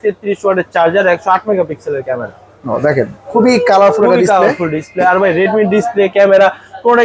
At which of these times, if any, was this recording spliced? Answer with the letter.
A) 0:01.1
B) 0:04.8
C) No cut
C